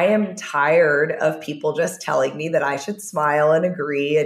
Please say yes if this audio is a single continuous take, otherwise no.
yes